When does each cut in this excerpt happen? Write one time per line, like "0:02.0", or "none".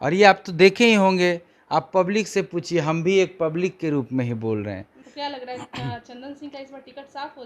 0:05.0